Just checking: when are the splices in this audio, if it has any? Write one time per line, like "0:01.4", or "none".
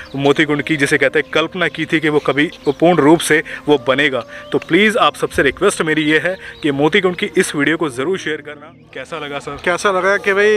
0:02.6
0:08.5